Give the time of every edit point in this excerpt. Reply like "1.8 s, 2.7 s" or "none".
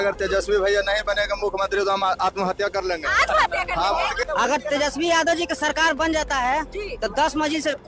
4.1 s